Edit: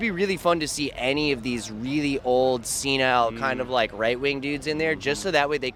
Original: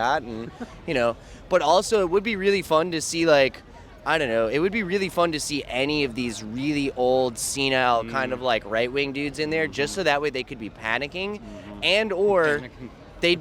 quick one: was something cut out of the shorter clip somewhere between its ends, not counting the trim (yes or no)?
no